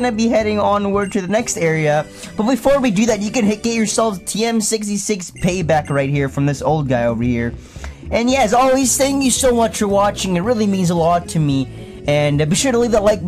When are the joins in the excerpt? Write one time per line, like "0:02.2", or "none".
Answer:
none